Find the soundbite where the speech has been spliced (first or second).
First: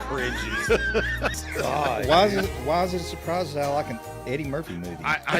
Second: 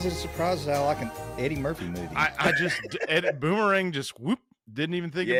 first